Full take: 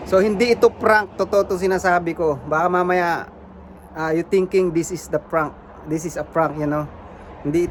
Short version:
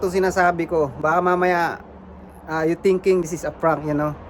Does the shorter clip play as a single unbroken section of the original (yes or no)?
no